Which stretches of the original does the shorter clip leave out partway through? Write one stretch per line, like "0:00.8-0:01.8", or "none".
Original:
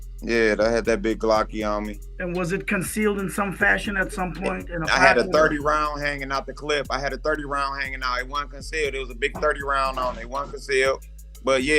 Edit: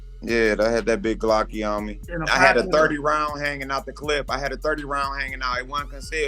0:02.1-0:04.7